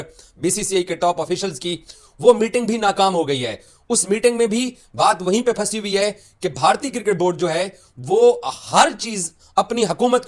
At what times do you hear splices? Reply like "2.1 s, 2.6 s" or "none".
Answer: none